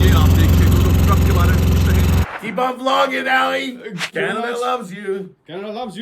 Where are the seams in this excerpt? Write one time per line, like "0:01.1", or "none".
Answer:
0:02.2
0:04.0

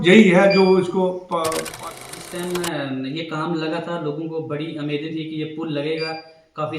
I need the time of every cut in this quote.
0:01.8

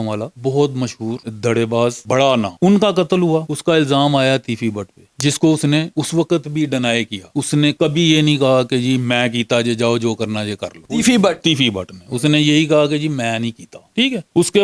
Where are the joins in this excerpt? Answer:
none

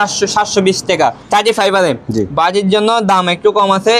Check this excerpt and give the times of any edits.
0:01.2

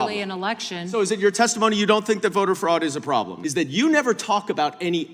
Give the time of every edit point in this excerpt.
0:03.4

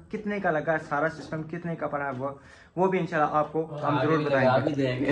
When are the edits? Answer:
none

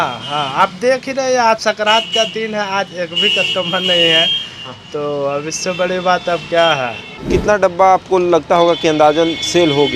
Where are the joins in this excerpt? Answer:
0:07.2

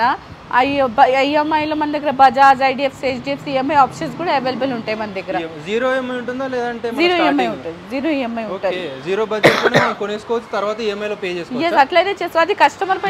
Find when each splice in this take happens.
none

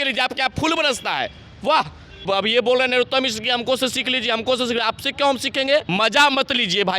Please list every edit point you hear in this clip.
0:02.2
0:05.9

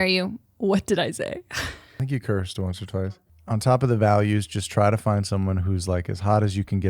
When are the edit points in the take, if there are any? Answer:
0:01.8
0:02.7

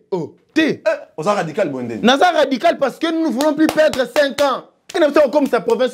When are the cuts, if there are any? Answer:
0:04.9

